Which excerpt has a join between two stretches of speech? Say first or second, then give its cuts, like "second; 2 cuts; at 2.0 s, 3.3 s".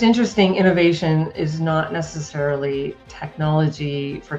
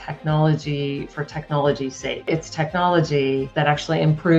second; 2 cuts; at 2.3 s, 3.5 s